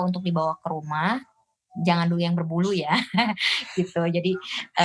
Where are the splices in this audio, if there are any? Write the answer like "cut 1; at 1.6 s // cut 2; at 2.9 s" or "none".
none

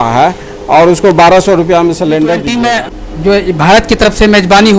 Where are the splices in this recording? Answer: cut 1; at 2.5 s

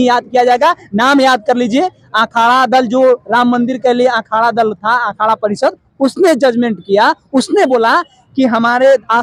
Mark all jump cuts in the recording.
none

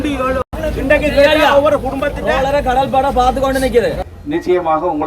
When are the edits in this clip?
cut 1; at 4.1 s

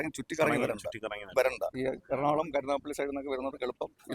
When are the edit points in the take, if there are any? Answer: cut 1; at 1.7 s

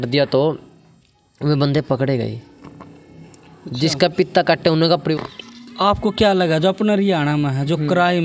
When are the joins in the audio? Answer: cut 1; at 5.1 s

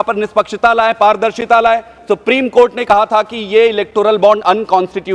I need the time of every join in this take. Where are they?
cut 1; at 1.9 s

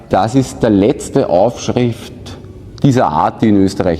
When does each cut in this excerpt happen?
none

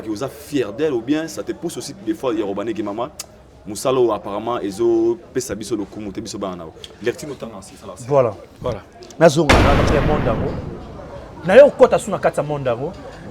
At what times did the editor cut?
cut 1; at 9.9 s

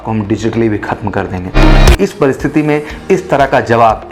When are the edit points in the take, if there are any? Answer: cut 1; at 1.8 s

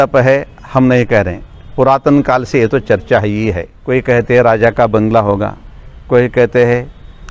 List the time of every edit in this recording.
cut 1; at 3.7 s

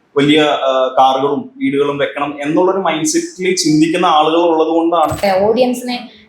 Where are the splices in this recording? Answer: cut 1; at 5.2 s

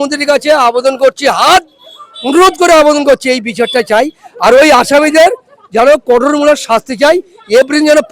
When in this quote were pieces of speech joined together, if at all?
none

